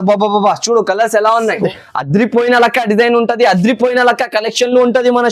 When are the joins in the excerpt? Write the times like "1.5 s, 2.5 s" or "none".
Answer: 1.7 s